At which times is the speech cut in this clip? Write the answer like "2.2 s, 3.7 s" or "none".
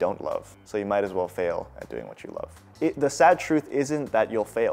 2.5 s